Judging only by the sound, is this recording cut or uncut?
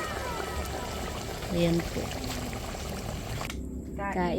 cut